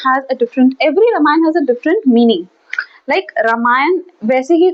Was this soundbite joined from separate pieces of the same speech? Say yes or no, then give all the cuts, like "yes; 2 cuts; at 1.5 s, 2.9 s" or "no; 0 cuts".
no; 0 cuts